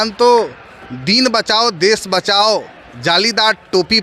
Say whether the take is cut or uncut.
uncut